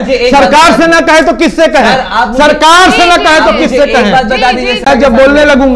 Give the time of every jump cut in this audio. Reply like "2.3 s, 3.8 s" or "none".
4.8 s